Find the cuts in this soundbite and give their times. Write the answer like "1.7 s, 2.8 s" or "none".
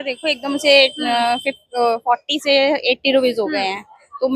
none